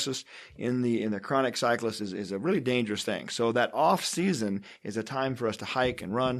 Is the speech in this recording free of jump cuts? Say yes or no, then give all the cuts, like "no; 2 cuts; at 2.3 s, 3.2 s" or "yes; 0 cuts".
yes; 0 cuts